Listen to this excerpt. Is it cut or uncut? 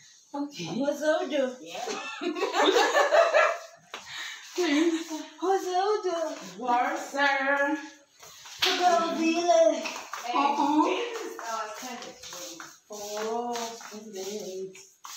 uncut